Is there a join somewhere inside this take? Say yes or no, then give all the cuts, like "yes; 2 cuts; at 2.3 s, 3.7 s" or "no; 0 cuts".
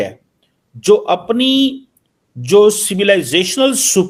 no; 0 cuts